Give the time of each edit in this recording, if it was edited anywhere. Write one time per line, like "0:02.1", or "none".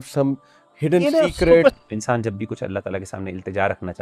0:01.8